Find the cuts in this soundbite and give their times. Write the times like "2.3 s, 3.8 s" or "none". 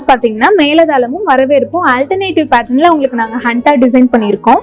none